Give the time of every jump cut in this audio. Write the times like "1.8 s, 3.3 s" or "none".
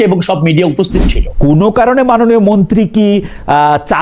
1.2 s